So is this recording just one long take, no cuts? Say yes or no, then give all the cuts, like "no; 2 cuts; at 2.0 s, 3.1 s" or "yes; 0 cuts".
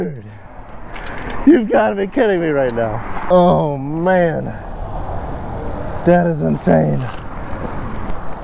no; 1 cut; at 3.2 s